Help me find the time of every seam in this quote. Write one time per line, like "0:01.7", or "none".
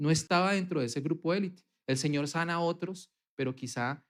none

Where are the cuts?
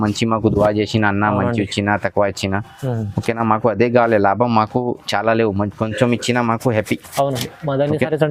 none

